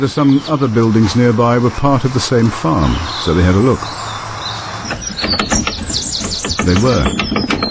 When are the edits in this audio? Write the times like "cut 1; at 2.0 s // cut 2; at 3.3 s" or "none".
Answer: cut 1; at 1.2 s